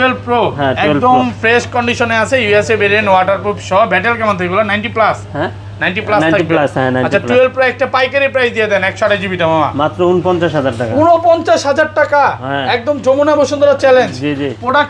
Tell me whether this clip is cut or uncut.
uncut